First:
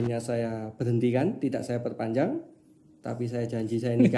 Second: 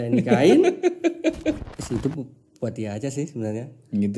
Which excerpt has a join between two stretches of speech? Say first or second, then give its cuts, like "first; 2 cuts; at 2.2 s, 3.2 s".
second; 1 cut; at 1.6 s